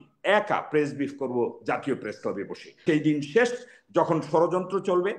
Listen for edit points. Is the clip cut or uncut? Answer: cut